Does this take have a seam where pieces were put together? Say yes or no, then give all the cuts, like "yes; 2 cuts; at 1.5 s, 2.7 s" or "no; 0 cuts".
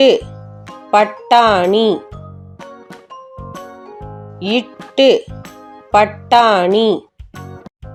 no; 0 cuts